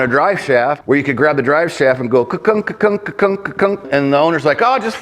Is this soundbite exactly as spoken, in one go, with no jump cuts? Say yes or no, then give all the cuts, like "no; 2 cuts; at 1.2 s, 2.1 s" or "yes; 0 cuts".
no; 2 cuts; at 0.8 s, 3.9 s